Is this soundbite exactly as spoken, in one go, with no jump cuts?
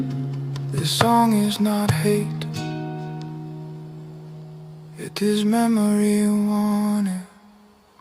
no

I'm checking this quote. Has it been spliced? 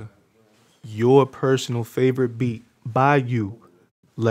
no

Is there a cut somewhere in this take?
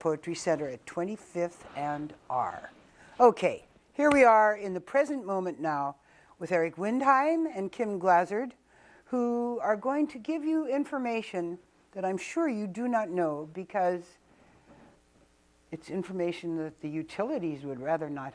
yes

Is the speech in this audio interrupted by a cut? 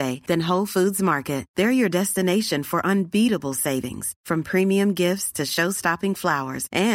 no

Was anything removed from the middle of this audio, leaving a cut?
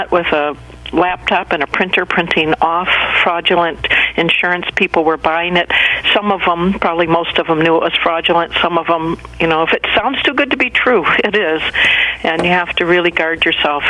no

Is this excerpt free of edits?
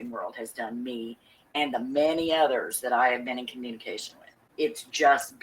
no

